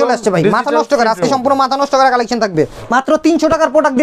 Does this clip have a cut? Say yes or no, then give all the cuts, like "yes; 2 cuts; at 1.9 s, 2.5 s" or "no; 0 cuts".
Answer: yes; 1 cut; at 2.8 s